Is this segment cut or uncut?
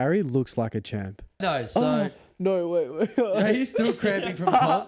cut